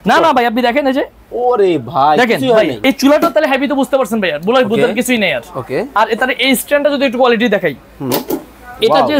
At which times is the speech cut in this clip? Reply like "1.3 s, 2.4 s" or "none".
2.8 s